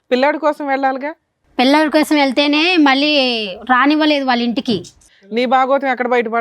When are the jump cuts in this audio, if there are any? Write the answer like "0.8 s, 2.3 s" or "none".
5.0 s